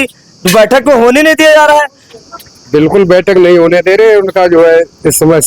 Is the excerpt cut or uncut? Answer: uncut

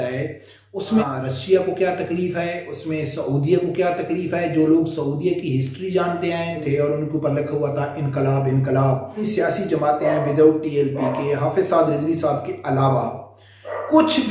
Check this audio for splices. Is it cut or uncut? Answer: cut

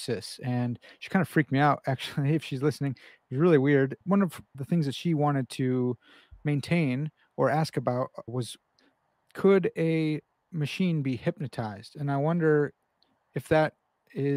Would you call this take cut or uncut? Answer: cut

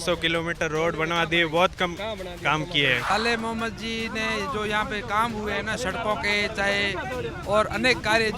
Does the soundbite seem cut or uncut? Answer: cut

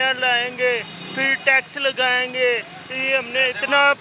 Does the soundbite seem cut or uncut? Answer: uncut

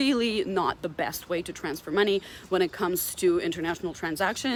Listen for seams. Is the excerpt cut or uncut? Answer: uncut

